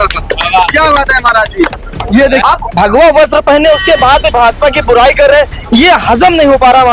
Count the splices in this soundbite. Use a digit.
1